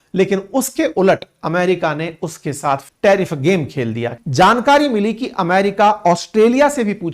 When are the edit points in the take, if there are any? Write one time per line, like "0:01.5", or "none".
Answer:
0:02.9
0:04.2